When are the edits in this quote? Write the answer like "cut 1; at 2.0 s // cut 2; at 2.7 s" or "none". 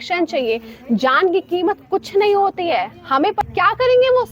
cut 1; at 3.4 s